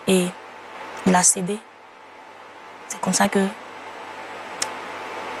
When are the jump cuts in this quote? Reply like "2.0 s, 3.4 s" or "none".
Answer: none